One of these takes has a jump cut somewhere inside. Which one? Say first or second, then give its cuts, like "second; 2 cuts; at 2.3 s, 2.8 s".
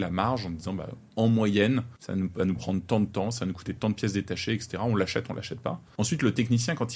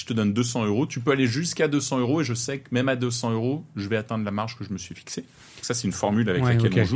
first; 2 cuts; at 2.0 s, 5.8 s